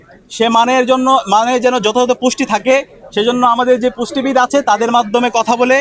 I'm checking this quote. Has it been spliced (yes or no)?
no